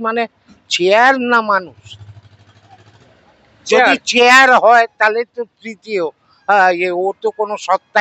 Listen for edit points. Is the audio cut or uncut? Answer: uncut